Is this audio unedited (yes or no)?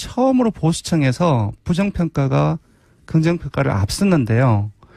yes